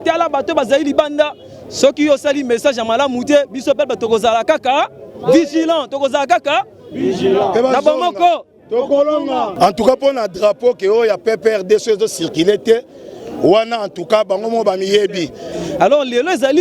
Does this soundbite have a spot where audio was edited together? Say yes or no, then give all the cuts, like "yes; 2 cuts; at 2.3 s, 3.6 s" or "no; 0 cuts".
yes; 2 cuts; at 9.5 s, 15.5 s